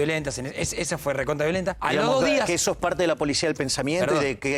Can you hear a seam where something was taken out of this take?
yes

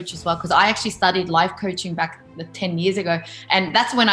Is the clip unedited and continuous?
yes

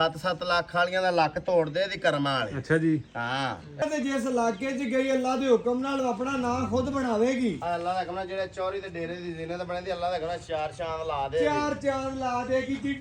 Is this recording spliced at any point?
yes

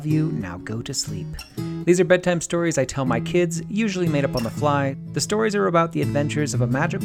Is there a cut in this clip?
yes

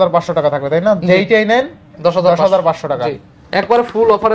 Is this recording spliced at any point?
no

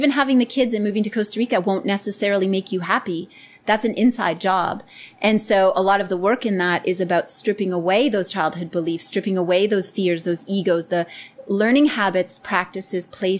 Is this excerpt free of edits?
yes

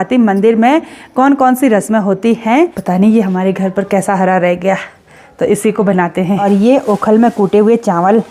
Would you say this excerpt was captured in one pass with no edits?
no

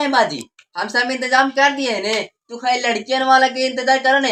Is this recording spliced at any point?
no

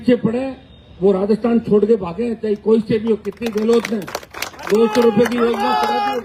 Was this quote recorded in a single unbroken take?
yes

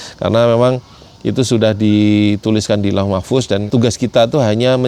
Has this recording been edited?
yes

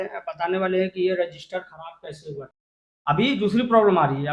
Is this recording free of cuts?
no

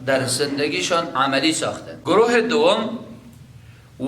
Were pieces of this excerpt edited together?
yes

